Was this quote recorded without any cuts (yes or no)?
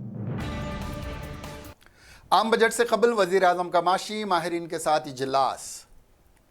no